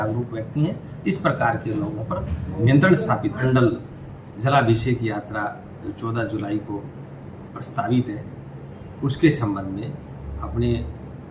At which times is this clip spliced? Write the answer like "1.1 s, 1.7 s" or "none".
3.4 s